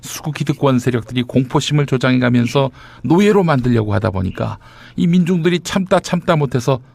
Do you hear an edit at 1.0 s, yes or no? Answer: yes